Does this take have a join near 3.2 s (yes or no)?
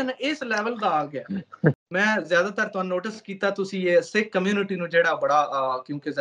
no